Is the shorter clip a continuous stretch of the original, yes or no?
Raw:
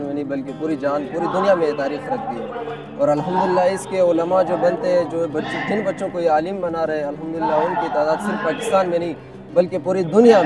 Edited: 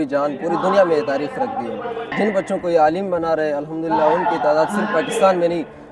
no